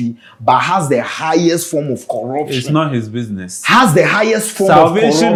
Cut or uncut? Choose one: uncut